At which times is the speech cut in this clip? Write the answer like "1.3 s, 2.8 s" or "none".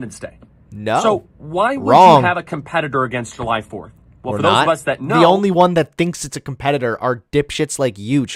none